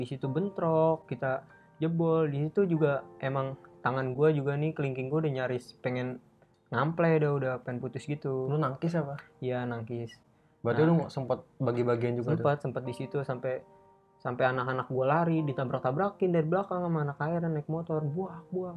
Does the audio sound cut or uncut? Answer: uncut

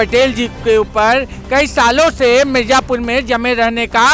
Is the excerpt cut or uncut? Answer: uncut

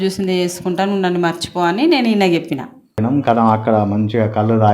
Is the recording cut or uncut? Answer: cut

